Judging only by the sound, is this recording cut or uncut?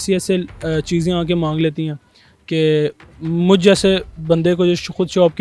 uncut